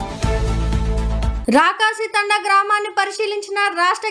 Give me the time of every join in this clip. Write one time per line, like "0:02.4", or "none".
0:01.4

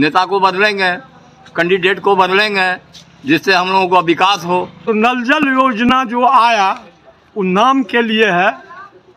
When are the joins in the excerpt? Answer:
0:04.8

